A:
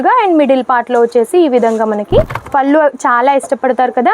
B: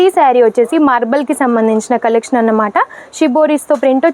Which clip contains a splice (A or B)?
A